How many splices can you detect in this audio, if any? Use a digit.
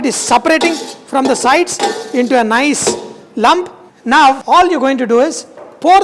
0